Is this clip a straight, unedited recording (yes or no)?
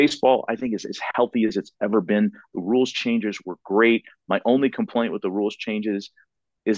yes